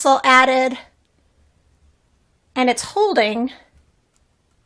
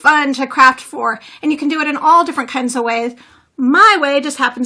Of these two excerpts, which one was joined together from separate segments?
second; 1 cut; at 2.9 s

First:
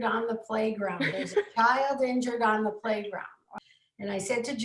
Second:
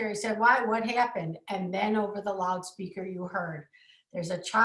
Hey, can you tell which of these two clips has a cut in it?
first; 1 cut; at 3.5 s

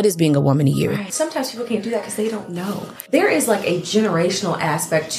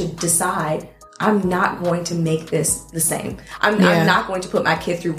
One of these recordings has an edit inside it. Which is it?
first; 2 cuts; at 1.1 s, 2.9 s

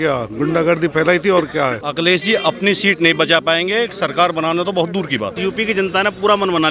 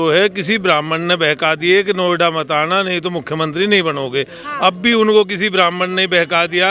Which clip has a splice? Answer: first; 2 cuts; at 1.8 s, 5.4 s

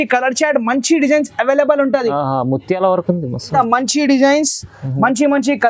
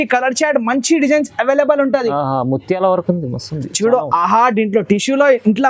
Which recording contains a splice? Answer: first; 1 cut; at 3.5 s

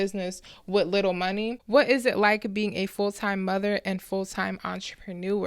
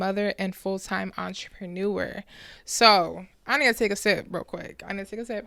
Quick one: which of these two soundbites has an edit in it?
first; 1 cut; at 1.6 s

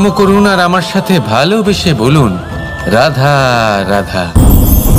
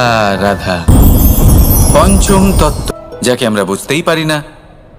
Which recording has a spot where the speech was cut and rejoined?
second; 1 cut; at 2.8 s

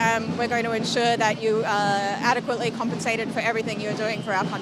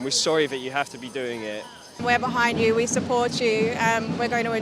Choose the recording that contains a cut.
second; 1 cut; at 2.0 s

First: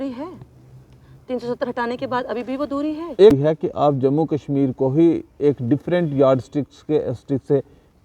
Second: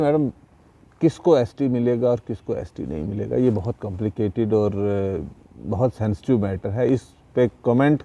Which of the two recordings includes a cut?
first; 1 cut; at 3.3 s

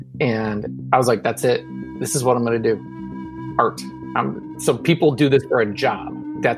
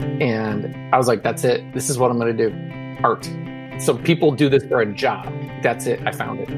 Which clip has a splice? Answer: second; 2 cuts; at 1.8 s, 3.1 s

